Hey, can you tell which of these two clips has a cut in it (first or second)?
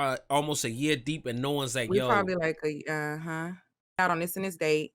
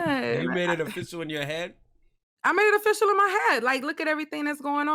first